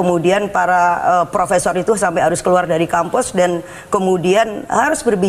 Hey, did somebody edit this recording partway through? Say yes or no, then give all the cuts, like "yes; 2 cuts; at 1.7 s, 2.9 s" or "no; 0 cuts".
no; 0 cuts